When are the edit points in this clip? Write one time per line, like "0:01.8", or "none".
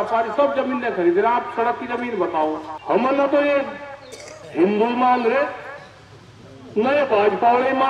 0:02.7